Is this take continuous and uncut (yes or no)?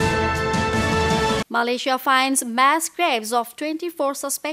no